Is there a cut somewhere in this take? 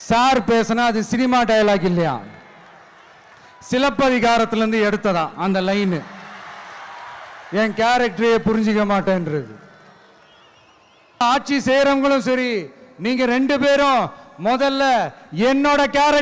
yes; 1 cut; at 11.2 s

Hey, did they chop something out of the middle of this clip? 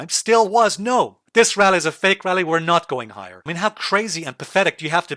yes; 1 cut; at 3.4 s

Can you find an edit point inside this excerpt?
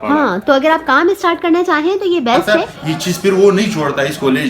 yes; 1 cut; at 2.6 s

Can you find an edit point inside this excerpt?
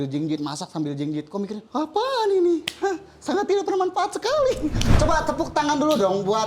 yes; 1 cut; at 4.8 s

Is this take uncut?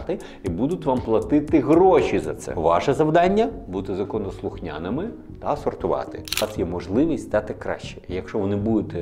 no; 1 cut; at 6.4 s

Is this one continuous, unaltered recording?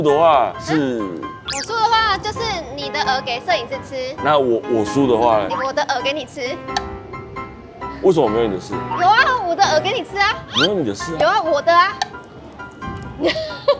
yes; 0 cuts

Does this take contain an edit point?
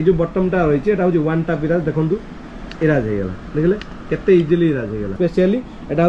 yes; 1 cut; at 5.1 s

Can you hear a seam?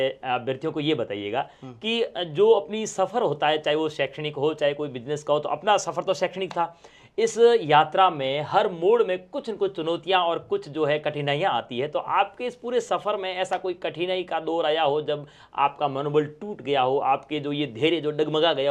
no; 0 cuts

